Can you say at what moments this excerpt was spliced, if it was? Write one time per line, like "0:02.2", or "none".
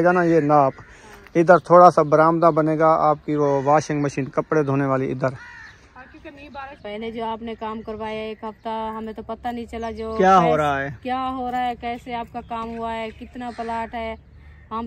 0:06.8